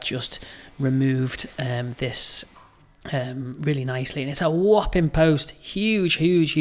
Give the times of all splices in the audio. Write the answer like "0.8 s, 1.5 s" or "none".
none